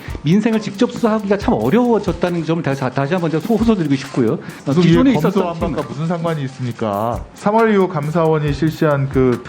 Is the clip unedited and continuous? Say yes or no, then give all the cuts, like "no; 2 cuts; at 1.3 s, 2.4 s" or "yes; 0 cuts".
no; 2 cuts; at 4.6 s, 7.2 s